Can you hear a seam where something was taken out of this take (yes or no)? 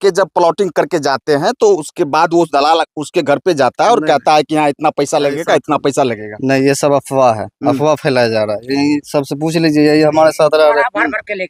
no